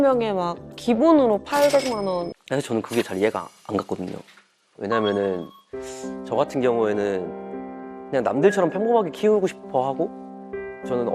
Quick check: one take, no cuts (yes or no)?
no